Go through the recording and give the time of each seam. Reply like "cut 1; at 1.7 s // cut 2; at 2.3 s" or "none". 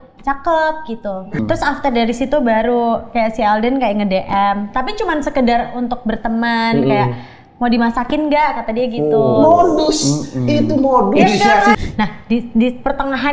cut 1; at 1.4 s // cut 2; at 11.8 s